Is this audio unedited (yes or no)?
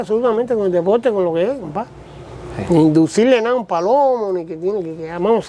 yes